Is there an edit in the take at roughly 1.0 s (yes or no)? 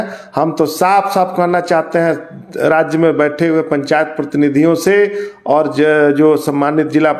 no